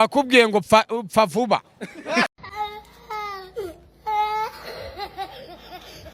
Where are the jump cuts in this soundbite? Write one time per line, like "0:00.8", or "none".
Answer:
0:02.3

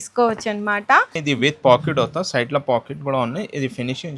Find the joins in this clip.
0:01.2

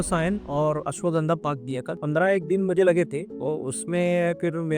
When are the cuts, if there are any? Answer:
0:01.9
0:03.3

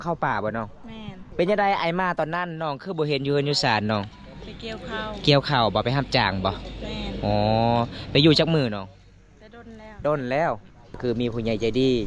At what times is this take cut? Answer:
0:01.2
0:10.9

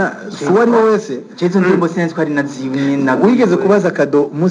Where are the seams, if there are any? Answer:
none

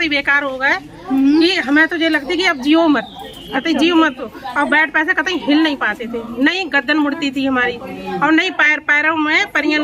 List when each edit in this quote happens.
none

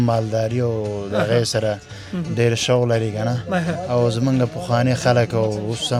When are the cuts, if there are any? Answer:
none

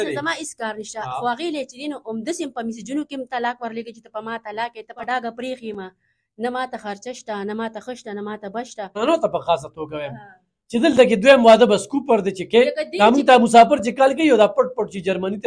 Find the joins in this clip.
0:05.0
0:09.0

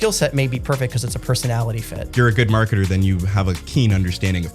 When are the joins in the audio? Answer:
0:02.0
0:03.6

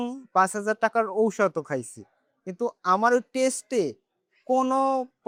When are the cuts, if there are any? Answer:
none

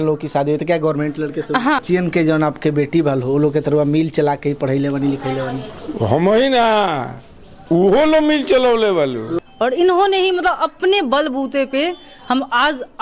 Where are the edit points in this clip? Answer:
0:01.8
0:09.3

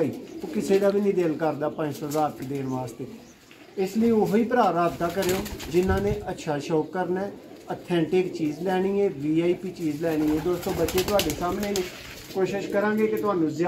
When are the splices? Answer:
none

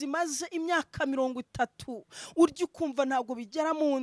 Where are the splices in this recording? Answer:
none

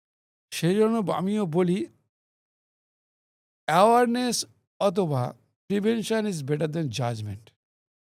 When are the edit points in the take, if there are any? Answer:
none

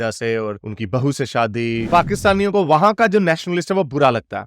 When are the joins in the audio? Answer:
0:01.9

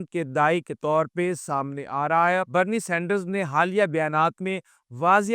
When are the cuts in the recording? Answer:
0:02.4

